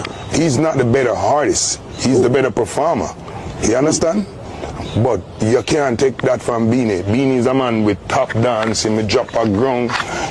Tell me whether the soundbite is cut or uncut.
uncut